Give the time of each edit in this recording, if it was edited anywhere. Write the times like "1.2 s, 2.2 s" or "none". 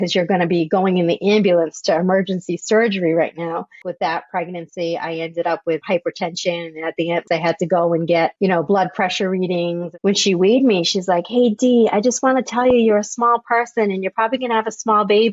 3.7 s, 5.8 s, 7.2 s, 9.8 s